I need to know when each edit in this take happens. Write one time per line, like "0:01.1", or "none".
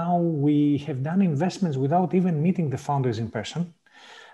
none